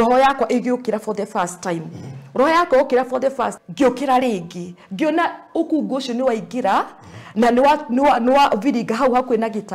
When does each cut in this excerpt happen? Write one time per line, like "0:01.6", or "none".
0:03.5

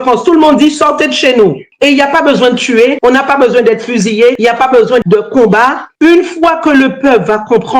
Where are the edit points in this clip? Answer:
0:03.0
0:04.4

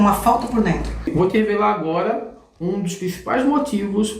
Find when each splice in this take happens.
0:01.1

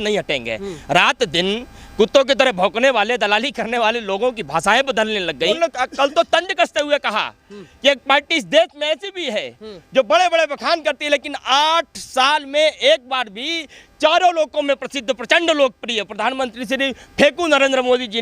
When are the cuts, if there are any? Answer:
0:05.5

